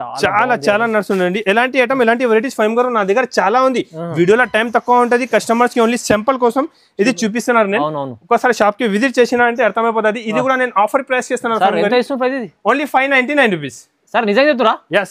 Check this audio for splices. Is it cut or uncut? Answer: uncut